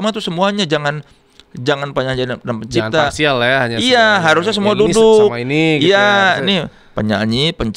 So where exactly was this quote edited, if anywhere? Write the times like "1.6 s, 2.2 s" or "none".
none